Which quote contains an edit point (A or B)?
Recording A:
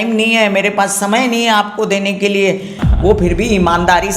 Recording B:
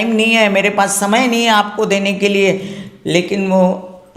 A